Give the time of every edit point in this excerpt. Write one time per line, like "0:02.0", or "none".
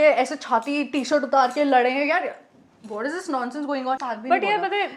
0:04.0

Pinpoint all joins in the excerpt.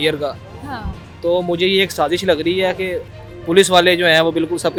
none

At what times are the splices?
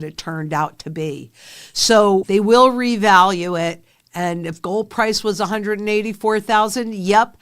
0:02.3

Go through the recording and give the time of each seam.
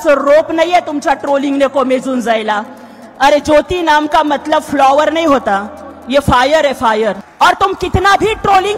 0:07.2

